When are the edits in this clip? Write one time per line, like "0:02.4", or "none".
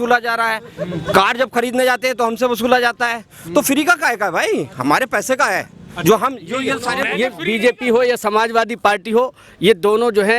0:07.1

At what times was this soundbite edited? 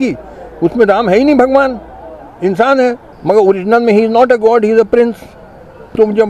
0:03.1

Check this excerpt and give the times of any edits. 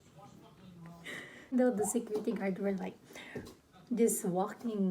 0:01.5

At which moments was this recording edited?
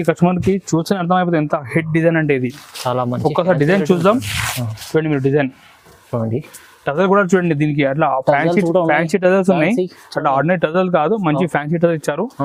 none

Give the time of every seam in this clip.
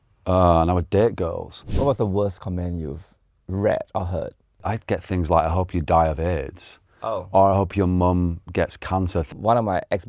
0:01.6
0:04.6
0:09.3

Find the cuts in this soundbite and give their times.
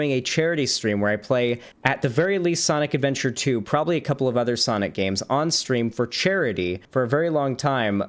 0:01.7
0:06.8

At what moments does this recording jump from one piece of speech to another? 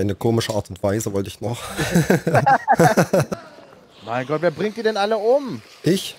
0:03.3

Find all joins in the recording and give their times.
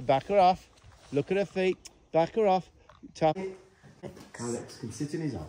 0:03.4

